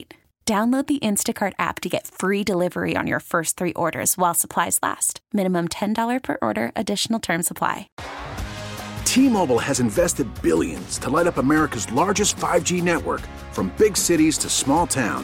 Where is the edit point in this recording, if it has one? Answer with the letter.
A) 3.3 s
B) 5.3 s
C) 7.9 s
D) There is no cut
C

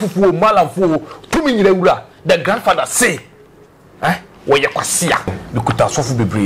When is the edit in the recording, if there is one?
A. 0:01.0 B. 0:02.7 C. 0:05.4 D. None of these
C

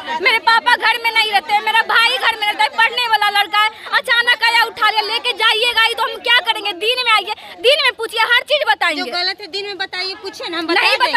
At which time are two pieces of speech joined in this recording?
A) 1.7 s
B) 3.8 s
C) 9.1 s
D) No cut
D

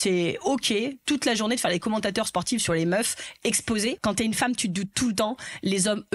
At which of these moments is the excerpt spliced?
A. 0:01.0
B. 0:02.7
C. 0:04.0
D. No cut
C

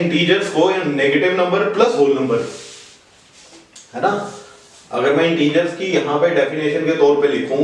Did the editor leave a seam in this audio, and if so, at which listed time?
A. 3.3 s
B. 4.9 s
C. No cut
C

